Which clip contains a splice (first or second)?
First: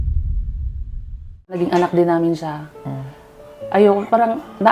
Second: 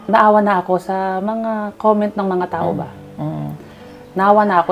first